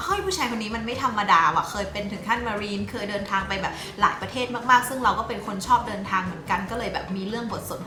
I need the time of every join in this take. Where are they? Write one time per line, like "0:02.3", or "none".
none